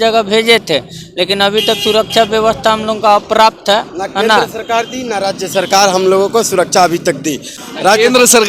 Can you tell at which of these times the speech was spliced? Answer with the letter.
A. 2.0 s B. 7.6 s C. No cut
B